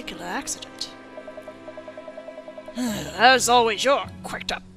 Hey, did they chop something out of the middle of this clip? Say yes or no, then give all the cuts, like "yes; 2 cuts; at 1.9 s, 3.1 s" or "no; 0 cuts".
yes; 1 cut; at 3.2 s